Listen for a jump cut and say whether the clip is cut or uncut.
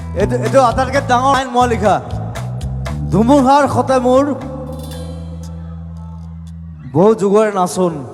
cut